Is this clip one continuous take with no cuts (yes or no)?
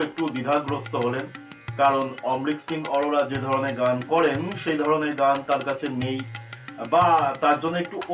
yes